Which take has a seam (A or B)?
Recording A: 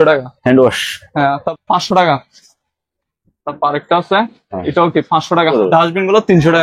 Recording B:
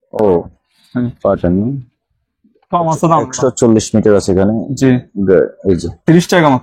A